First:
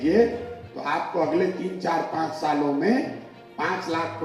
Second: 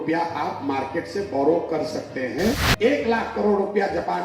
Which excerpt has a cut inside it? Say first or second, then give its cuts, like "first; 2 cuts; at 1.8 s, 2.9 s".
second; 1 cut; at 2.7 s